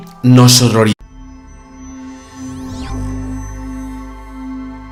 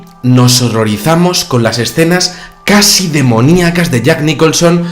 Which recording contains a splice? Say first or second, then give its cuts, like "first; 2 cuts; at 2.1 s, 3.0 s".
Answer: second; 1 cut; at 0.9 s